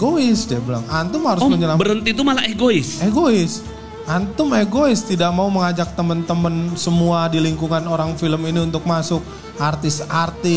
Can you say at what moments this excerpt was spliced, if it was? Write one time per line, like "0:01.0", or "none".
none